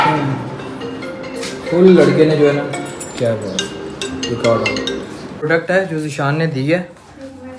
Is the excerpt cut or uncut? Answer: cut